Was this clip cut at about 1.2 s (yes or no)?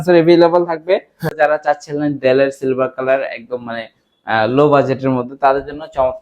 yes